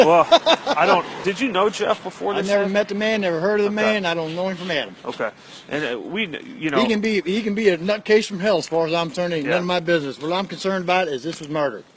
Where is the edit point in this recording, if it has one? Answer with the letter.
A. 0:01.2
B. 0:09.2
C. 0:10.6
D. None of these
A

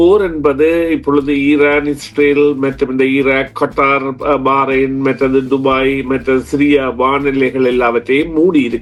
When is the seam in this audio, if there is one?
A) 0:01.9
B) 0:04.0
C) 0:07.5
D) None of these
D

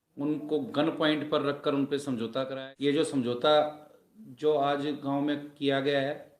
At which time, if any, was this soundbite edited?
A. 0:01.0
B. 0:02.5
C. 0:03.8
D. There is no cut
B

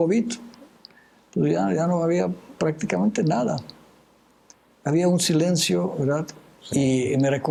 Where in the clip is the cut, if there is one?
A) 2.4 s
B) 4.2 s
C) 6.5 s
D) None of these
D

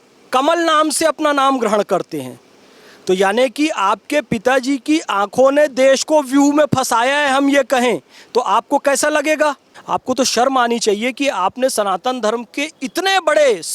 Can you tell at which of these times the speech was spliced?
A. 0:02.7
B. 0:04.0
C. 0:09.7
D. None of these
C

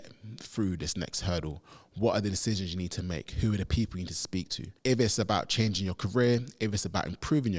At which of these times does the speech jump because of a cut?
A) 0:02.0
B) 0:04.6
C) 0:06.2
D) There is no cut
B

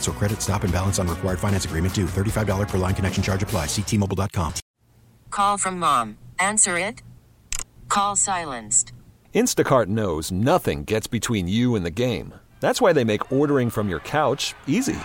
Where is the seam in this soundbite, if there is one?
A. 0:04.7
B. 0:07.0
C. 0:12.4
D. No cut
A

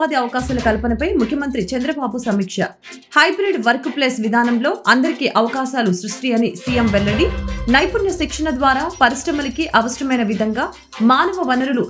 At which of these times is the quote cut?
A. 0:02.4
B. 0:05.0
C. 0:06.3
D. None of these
D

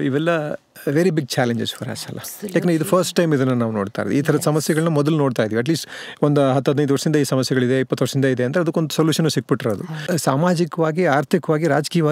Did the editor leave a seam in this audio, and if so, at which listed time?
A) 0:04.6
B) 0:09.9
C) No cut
B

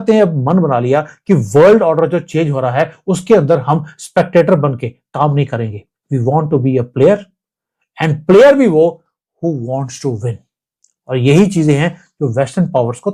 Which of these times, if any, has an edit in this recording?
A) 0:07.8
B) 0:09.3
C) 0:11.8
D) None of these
D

